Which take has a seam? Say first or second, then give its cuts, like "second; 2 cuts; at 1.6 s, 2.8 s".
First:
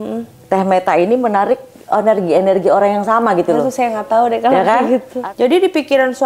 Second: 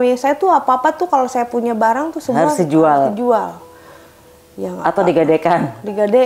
first; 1 cut; at 5.1 s